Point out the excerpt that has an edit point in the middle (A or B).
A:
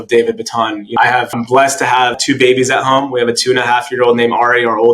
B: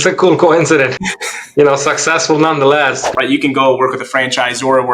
B